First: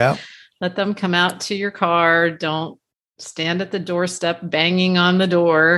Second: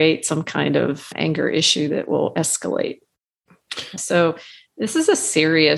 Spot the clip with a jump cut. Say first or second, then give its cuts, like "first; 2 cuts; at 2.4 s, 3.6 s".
second; 1 cut; at 4.0 s